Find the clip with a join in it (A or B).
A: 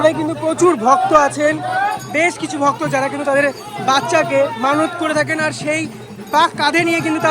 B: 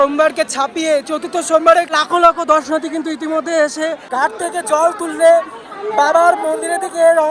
B